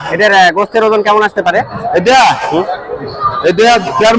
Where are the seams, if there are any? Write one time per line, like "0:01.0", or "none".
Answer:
none